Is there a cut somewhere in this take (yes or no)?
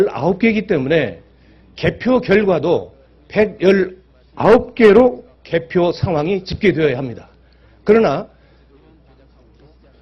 no